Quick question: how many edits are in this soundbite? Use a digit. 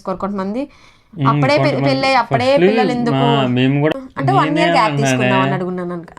1